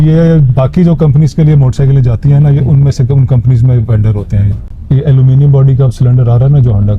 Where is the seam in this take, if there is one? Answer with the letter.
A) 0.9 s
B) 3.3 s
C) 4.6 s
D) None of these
C